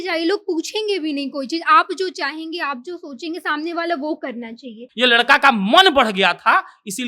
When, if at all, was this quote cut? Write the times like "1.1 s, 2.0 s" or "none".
4.8 s